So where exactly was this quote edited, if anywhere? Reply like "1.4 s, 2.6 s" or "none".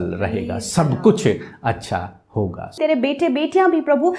2.8 s